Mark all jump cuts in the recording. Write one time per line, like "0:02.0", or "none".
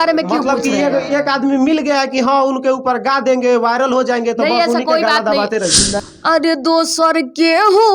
0:06.0